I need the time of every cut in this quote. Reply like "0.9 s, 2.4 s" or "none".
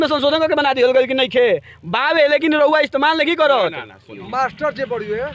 4.2 s